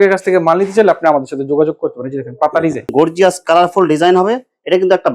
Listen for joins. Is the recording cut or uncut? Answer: cut